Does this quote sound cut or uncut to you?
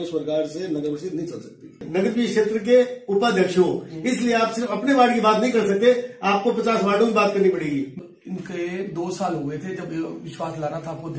cut